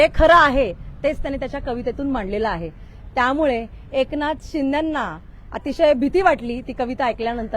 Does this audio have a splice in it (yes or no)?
no